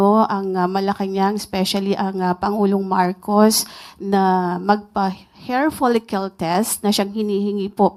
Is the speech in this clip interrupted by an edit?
no; 0 cuts

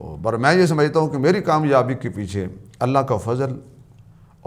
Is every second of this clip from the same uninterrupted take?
yes; 0 cuts

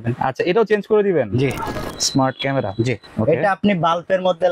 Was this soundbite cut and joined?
yes; 2 cuts; at 1.8 s, 3.1 s

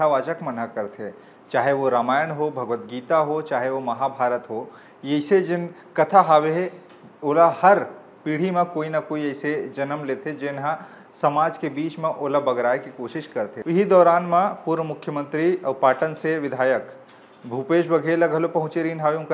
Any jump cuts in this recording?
yes; 1 cut; at 13.6 s

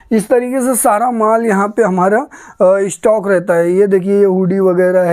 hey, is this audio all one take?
yes; 0 cuts

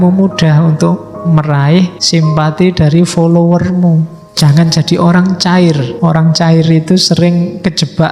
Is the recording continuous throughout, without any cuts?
no; 3 cuts; at 2.0 s, 4.2 s, 5.9 s

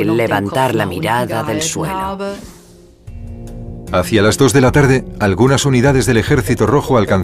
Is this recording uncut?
no; 1 cut; at 2.8 s

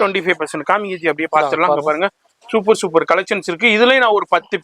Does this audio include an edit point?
no; 0 cuts

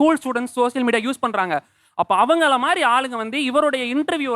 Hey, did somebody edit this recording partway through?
no; 0 cuts

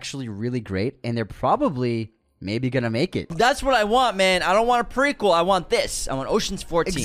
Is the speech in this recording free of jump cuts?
no; 1 cut; at 3.2 s

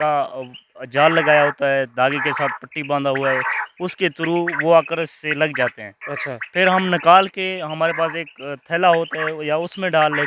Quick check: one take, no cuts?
yes; 0 cuts

